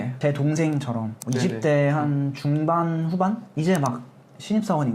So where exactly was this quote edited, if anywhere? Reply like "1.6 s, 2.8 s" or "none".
3.5 s